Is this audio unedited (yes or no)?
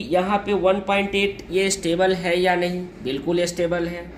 yes